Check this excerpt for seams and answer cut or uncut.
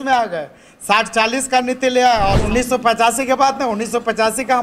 cut